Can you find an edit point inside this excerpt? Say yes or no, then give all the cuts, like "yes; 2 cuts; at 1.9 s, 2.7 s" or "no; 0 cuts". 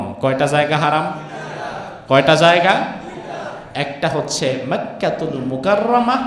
no; 0 cuts